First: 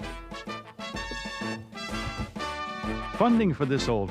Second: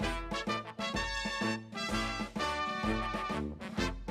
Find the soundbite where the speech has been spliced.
first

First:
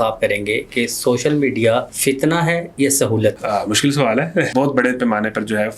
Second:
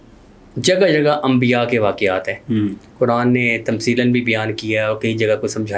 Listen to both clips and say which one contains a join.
first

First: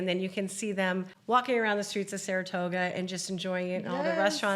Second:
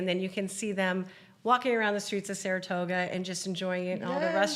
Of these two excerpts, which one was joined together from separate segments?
first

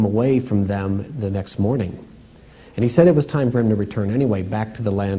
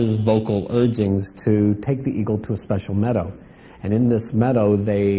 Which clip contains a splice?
second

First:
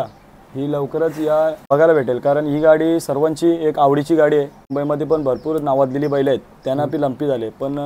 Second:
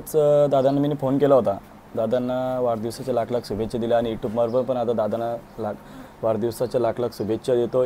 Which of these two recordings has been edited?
first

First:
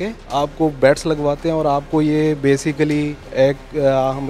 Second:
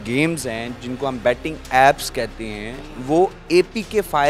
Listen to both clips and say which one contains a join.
first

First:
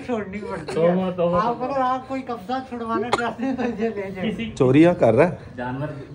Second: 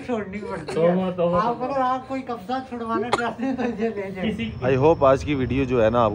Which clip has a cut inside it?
first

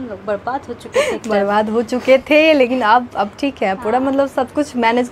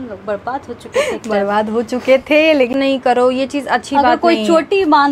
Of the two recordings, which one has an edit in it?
second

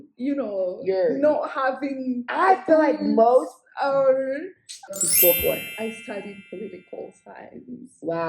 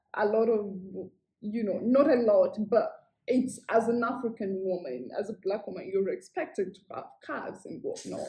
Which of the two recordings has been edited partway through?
first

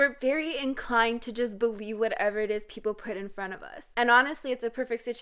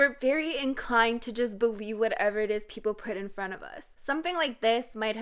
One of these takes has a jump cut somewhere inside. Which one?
second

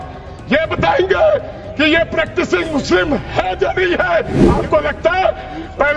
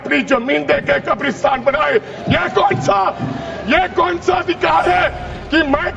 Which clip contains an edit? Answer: first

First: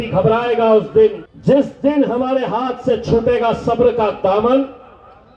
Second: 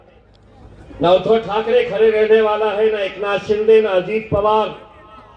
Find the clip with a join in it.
first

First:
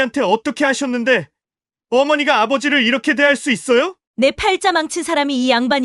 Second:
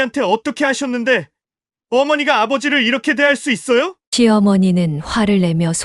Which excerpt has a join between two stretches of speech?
first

